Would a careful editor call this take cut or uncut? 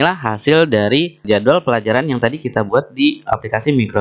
cut